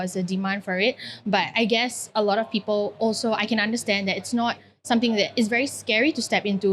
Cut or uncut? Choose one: uncut